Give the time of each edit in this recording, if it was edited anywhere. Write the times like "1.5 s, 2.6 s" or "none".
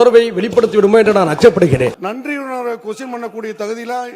2.0 s